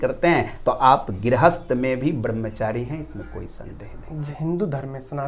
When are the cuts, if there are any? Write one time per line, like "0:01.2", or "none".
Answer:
0:04.3